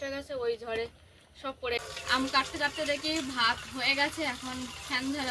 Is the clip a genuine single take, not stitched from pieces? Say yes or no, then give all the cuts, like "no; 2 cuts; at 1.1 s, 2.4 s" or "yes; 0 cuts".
no; 1 cut; at 1.8 s